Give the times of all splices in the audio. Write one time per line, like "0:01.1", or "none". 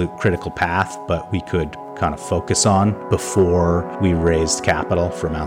none